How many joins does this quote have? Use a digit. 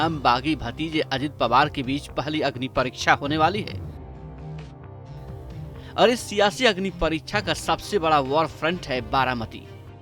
0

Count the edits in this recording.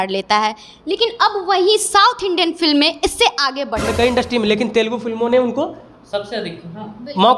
1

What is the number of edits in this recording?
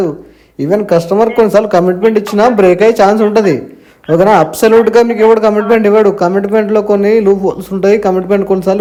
0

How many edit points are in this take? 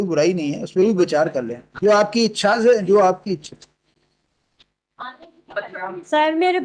0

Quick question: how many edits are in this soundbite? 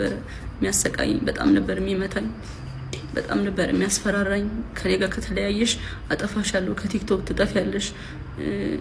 0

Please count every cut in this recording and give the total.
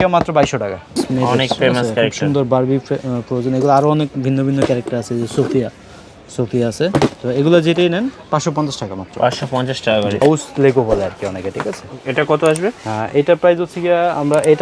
2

